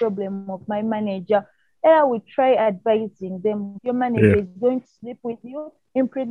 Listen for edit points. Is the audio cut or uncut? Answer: cut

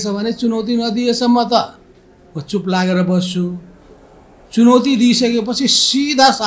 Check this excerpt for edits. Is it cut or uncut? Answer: uncut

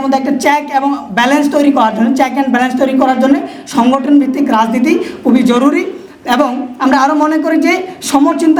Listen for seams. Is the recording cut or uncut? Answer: uncut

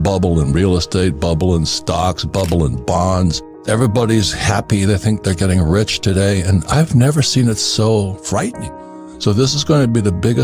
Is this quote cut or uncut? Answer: cut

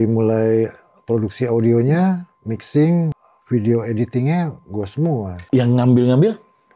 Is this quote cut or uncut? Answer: cut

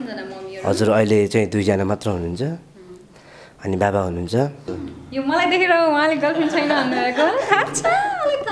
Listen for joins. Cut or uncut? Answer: cut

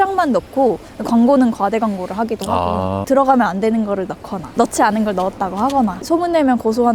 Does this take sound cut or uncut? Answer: cut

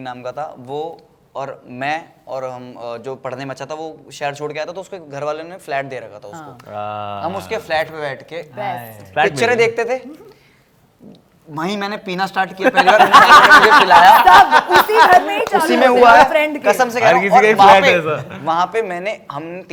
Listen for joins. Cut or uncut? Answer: uncut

